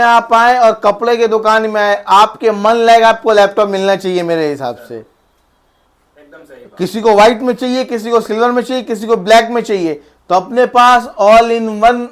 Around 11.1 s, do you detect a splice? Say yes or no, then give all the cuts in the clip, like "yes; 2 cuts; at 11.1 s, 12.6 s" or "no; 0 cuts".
no; 0 cuts